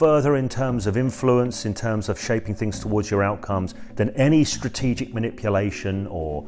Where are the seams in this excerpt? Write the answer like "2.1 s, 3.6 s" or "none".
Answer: none